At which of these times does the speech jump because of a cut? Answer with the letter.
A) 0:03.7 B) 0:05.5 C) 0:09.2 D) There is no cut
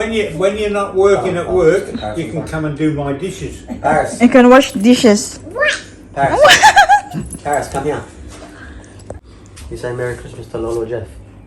C